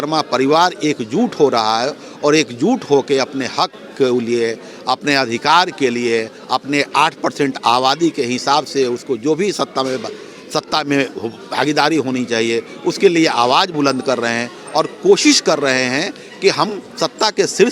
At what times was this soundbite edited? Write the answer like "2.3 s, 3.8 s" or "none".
none